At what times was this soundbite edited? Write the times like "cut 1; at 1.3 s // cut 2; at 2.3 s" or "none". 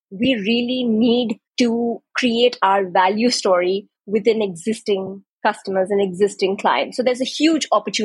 cut 1; at 2.1 s